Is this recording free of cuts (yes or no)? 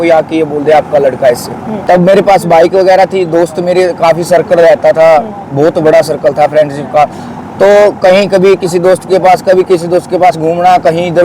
no